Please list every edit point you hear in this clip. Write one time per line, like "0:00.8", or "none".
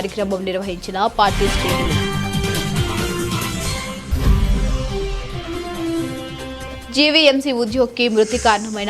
0:01.9
0:03.2